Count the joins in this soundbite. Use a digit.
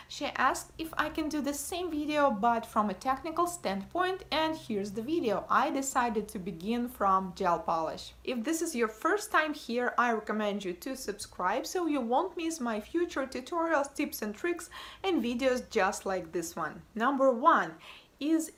0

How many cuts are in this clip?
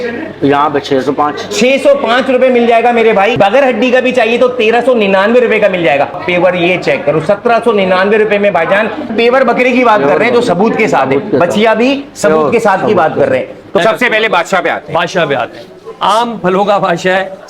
4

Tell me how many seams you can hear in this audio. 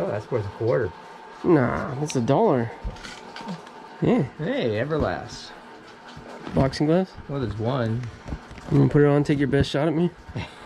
1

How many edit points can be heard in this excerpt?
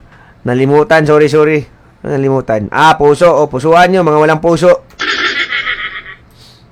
0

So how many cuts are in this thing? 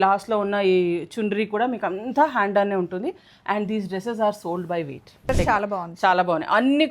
1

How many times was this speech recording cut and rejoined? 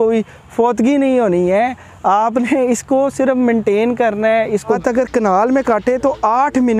1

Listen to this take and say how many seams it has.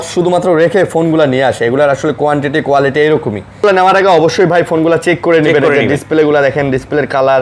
1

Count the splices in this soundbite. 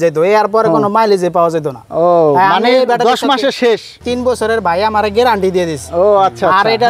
1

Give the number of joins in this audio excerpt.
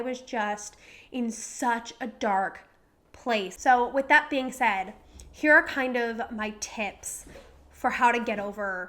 1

